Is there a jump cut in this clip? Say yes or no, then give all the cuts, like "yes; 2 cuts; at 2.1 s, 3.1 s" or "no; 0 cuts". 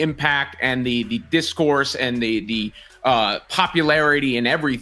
no; 0 cuts